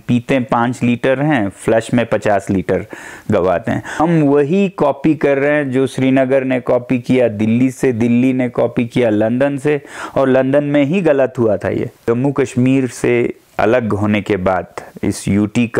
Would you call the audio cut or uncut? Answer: cut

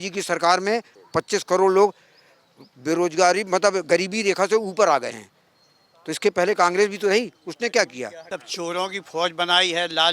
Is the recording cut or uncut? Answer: cut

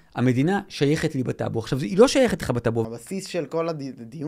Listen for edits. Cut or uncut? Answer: cut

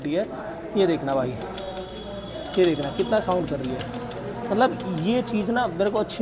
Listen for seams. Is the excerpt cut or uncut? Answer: uncut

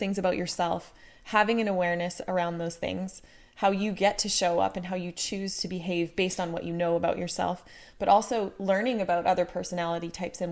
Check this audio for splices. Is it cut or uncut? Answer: uncut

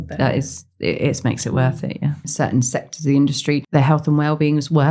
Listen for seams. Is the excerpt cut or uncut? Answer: cut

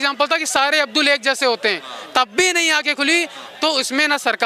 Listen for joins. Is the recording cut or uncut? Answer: uncut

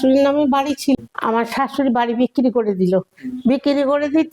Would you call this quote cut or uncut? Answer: cut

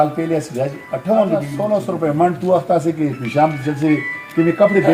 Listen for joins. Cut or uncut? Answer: cut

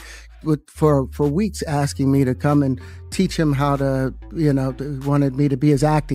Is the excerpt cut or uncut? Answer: uncut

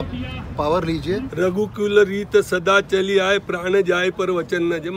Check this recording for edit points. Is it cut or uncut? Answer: cut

